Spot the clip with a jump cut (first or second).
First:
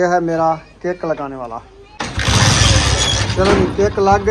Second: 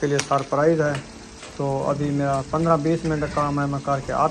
first